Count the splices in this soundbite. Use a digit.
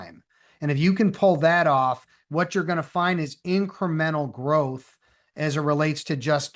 0